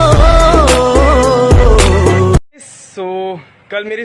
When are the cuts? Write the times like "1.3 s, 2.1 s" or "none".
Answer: 2.5 s